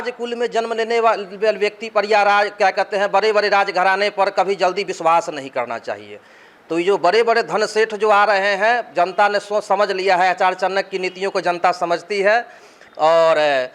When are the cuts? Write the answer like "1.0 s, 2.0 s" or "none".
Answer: none